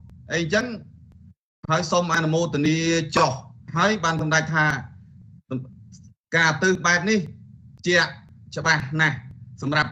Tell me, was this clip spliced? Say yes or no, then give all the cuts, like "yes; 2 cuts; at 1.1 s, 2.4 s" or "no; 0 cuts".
no; 0 cuts